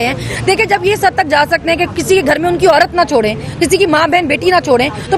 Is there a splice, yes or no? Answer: no